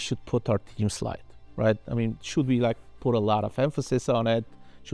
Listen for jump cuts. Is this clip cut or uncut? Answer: uncut